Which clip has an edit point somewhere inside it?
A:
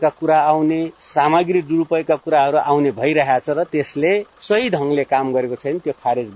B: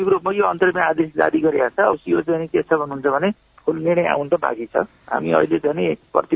A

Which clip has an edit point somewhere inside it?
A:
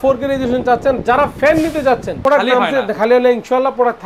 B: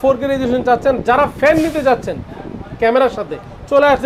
A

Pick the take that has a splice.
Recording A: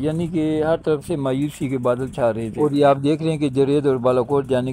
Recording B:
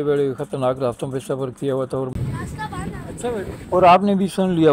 B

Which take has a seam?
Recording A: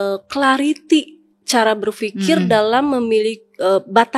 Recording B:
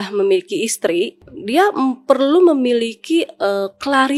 B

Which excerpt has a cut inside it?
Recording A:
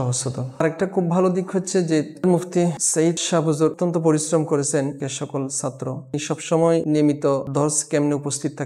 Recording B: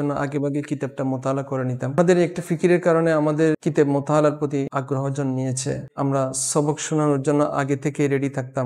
B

